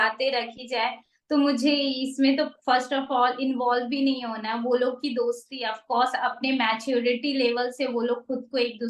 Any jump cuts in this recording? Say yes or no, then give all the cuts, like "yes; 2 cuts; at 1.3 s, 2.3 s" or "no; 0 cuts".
no; 0 cuts